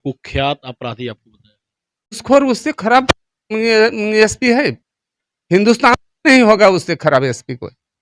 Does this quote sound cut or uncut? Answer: cut